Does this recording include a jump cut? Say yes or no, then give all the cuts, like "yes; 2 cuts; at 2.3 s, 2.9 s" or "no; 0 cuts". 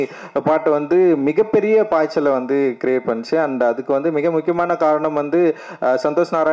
no; 0 cuts